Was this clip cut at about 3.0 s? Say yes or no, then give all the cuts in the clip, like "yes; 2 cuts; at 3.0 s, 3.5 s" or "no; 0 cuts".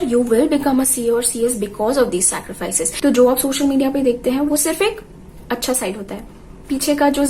yes; 1 cut; at 3.0 s